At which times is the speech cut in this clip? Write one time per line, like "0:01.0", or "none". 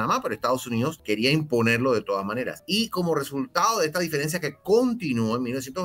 0:01.0
0:02.6